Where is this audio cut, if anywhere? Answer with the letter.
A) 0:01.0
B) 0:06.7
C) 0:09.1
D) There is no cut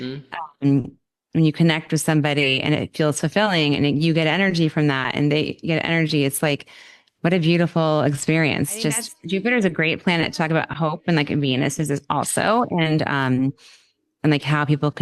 C